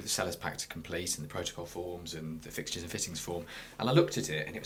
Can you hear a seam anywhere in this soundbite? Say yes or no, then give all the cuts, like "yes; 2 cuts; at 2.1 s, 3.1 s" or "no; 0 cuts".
no; 0 cuts